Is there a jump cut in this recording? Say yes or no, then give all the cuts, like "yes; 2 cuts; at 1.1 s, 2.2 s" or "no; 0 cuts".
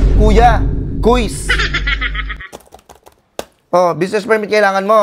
no; 0 cuts